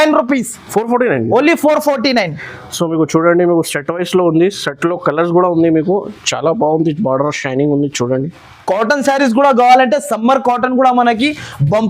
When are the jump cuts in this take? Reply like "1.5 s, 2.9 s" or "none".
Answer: 8.5 s